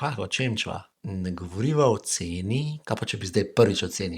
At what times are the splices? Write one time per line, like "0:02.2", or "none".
0:00.9